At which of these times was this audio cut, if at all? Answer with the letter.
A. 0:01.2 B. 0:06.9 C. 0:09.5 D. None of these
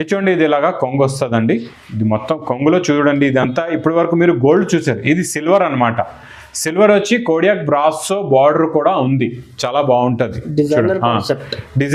D